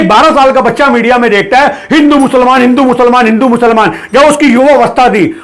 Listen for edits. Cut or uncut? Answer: uncut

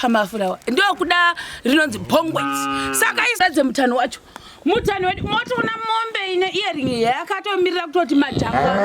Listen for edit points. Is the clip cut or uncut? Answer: cut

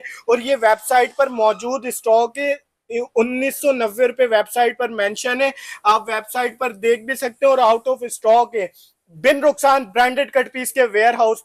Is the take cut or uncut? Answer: uncut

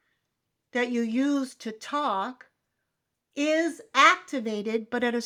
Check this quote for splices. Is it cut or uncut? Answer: uncut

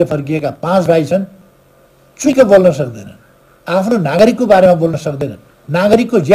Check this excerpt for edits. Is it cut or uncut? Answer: uncut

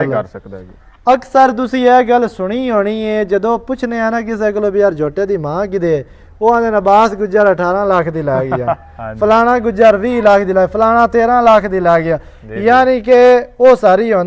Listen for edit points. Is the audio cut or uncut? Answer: uncut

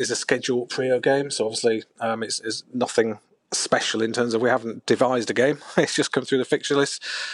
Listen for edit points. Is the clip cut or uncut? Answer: uncut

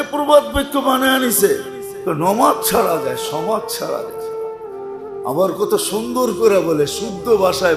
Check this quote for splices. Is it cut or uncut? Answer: uncut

